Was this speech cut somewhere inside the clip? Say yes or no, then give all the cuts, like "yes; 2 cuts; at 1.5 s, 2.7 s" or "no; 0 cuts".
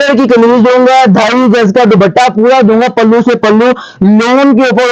no; 0 cuts